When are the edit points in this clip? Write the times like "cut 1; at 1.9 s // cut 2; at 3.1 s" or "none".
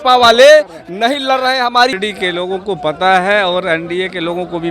cut 1; at 1.9 s